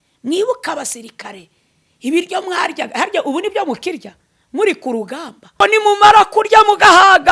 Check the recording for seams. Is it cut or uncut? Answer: cut